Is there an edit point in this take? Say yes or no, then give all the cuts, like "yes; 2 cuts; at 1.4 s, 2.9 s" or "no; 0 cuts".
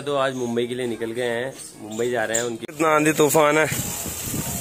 yes; 1 cut; at 2.6 s